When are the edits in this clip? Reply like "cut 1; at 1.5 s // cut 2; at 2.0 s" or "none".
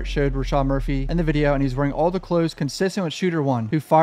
cut 1; at 1.0 s